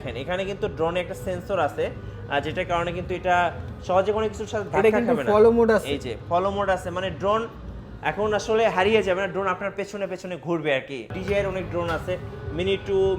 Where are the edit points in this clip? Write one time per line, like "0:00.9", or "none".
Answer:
0:11.2